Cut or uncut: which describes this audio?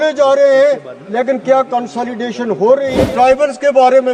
cut